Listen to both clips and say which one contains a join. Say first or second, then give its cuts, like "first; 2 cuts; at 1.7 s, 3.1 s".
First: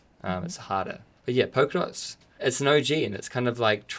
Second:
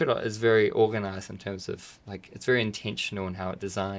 first; 1 cut; at 1.1 s